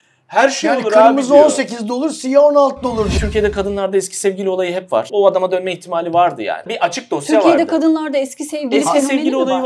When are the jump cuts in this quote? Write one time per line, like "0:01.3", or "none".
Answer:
0:03.1
0:05.1
0:06.7